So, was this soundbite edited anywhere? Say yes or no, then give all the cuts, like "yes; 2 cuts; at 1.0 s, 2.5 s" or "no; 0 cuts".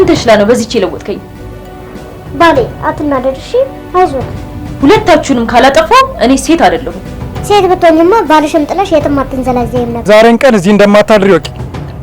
yes; 1 cut; at 10.1 s